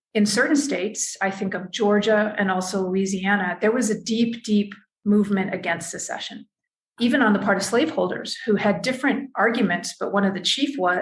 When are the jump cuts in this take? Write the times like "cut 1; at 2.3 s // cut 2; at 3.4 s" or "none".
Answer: cut 1; at 7.0 s